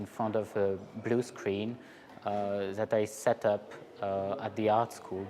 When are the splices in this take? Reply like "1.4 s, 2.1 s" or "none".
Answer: 2.9 s